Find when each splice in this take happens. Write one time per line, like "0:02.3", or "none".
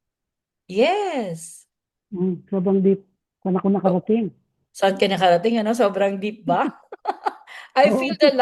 none